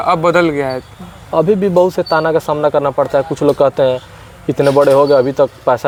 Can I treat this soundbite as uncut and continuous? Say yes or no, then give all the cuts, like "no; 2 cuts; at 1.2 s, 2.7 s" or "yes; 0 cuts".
yes; 0 cuts